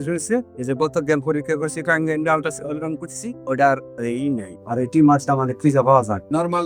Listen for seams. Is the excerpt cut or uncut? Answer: uncut